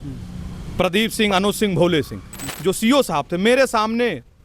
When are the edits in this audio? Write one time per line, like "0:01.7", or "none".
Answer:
0:02.4